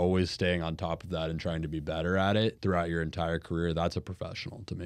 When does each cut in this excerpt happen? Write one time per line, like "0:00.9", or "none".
0:02.6